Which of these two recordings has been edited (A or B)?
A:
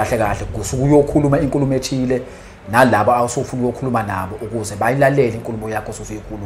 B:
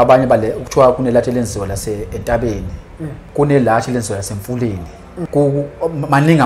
B